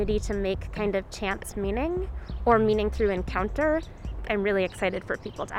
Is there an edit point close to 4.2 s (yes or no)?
yes